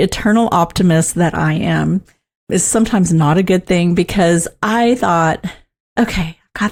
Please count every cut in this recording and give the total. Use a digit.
0